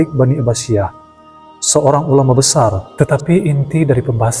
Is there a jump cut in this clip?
yes; 1 cut; at 2.8 s

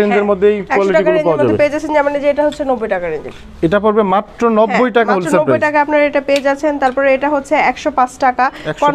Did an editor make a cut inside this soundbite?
no; 0 cuts

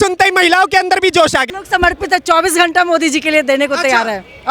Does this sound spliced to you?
yes; 1 cut; at 1.5 s

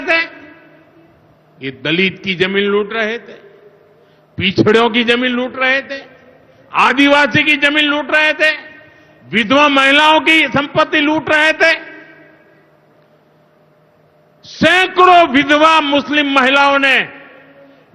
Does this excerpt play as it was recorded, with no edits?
yes; 0 cuts

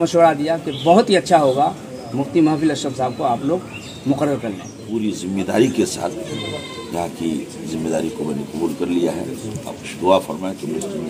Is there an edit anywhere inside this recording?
yes; 1 cut; at 4.7 s

